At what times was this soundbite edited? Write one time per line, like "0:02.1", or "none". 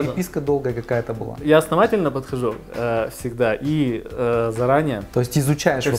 0:01.2
0:05.0